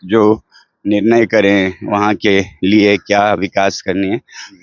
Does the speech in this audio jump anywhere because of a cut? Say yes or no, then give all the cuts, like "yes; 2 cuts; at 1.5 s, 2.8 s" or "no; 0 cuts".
no; 0 cuts